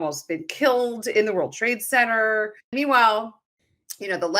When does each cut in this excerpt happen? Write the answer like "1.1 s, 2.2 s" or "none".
2.7 s